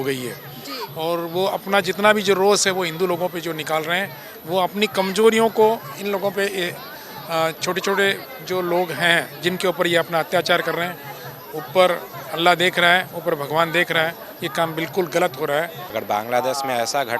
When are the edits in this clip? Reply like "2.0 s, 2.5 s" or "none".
15.8 s